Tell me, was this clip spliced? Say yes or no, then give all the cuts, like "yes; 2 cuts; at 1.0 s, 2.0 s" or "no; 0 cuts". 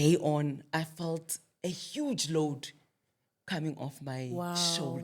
no; 0 cuts